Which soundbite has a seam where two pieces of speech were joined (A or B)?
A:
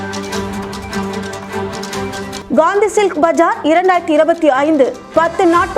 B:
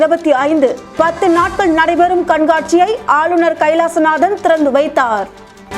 A